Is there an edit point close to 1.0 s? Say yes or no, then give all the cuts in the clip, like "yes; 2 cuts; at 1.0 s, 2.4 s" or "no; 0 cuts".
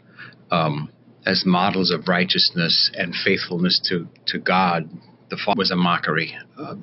no; 1 cut; at 5.5 s